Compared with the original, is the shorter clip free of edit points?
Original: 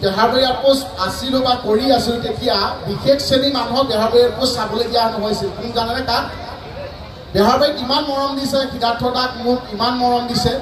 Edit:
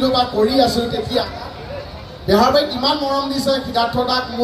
no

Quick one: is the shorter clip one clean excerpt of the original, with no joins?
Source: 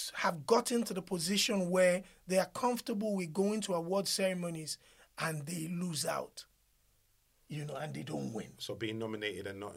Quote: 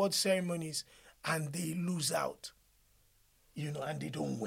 yes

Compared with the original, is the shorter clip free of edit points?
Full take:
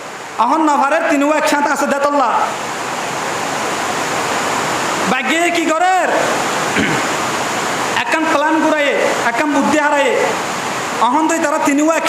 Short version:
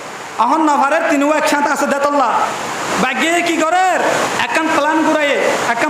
no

